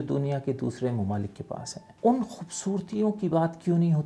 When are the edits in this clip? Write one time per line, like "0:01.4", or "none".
0:01.8